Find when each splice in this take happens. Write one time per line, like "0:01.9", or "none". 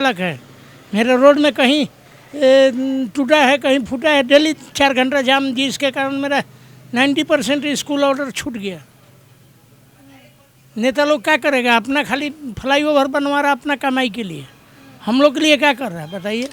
none